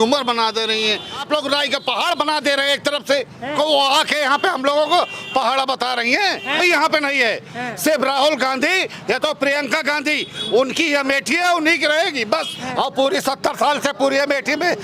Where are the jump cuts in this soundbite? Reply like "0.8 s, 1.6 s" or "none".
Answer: 1.2 s, 3.5 s, 6.6 s, 12.6 s